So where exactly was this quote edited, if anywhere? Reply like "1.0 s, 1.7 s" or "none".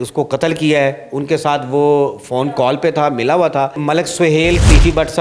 3.8 s